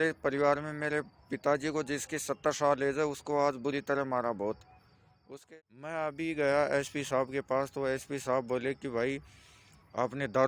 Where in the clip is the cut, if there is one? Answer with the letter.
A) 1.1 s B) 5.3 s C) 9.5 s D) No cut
B